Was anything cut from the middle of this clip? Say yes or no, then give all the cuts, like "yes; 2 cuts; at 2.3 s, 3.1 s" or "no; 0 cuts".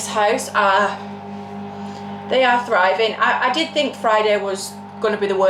no; 0 cuts